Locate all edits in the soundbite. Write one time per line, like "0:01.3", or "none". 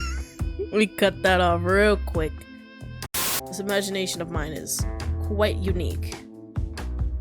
0:03.2